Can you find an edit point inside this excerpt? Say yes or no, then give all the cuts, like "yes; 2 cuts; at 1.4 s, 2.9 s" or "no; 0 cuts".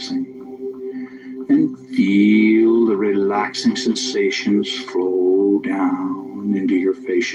no; 0 cuts